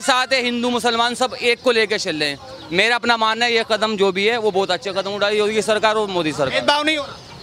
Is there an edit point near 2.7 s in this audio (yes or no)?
no